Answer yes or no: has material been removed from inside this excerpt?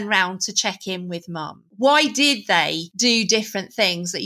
yes